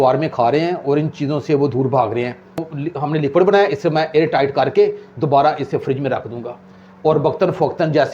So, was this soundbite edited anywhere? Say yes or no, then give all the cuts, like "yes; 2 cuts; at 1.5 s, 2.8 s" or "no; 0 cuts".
yes; 1 cut; at 2.8 s